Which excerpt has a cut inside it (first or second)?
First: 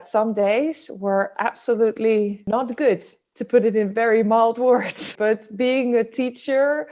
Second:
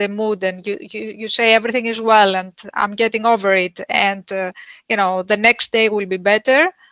first